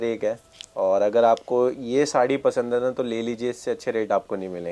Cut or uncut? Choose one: uncut